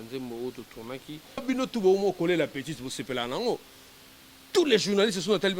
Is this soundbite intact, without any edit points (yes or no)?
no